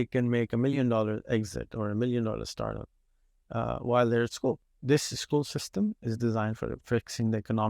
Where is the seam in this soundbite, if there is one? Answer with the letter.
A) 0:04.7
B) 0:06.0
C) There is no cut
A